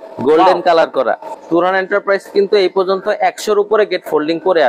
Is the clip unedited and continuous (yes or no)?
no